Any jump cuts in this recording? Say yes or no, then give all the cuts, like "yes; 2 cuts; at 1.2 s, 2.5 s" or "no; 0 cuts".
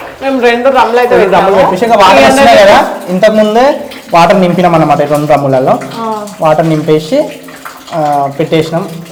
no; 0 cuts